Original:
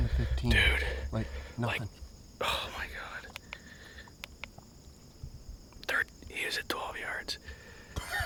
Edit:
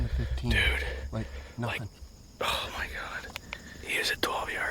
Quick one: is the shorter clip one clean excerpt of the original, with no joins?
no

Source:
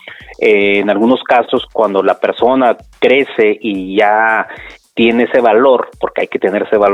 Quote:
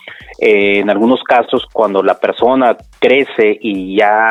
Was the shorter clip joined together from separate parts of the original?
no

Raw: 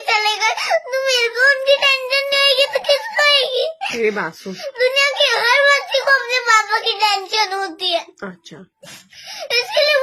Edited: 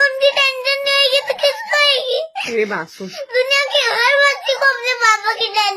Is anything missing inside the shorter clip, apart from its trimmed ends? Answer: no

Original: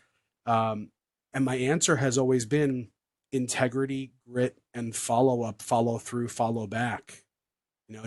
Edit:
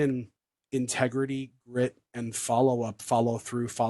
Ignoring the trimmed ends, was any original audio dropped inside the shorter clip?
no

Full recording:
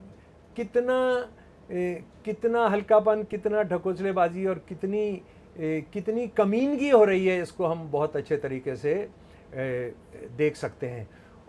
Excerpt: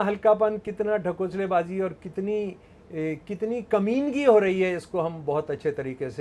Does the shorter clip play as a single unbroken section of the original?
yes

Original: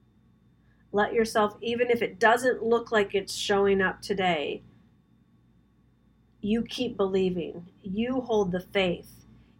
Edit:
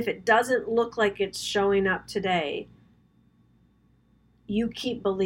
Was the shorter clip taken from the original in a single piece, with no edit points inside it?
yes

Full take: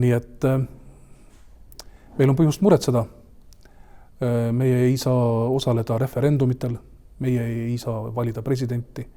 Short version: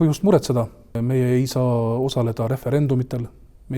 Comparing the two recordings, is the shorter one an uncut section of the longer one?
no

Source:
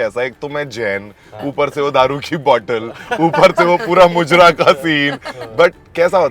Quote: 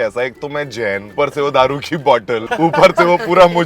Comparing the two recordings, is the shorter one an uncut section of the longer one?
no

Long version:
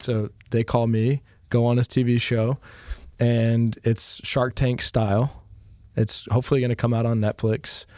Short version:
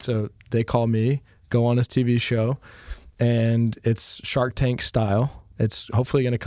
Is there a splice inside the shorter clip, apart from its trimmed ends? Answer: yes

